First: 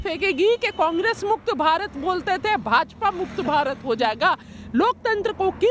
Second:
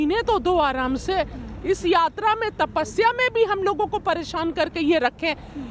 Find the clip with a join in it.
first; 1 cut; at 4.5 s

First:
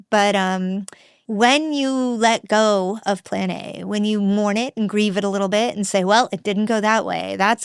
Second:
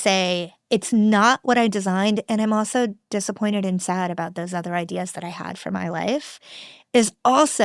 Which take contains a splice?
first; 1 cut; at 1.2 s

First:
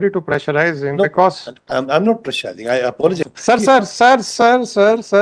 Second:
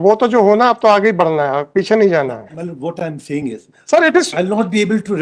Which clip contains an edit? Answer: first; 1 cut; at 3.2 s

